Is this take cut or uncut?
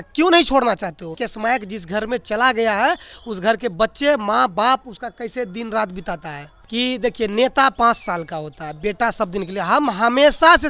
cut